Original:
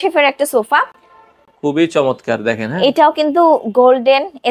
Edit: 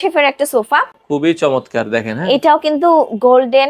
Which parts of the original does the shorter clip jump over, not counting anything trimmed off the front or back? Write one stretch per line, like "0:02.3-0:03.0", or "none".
0:01.0-0:01.5